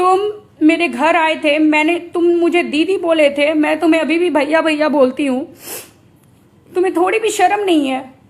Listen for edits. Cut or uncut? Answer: uncut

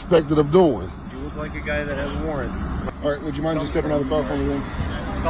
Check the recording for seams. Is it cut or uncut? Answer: cut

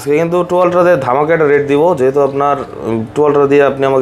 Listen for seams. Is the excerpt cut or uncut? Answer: uncut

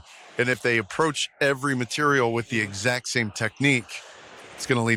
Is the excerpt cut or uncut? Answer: uncut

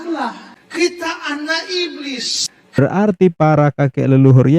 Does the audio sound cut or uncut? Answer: cut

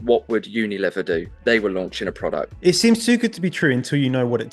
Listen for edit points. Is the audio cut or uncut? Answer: cut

